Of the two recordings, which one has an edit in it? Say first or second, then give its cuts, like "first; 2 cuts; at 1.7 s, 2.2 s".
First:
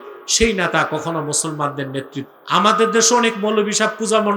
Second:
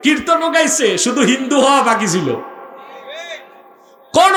first; 1 cut; at 2.3 s